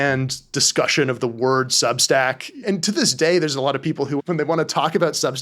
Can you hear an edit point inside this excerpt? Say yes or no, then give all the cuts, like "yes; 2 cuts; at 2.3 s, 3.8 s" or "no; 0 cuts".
yes; 1 cut; at 2.6 s